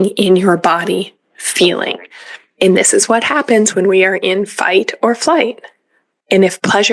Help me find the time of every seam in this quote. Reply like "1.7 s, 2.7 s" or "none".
none